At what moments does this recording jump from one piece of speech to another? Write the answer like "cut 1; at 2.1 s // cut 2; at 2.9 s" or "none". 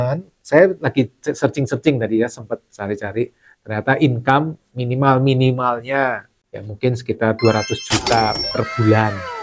none